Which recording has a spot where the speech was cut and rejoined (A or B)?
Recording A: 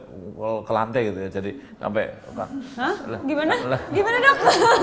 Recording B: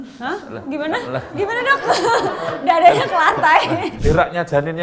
B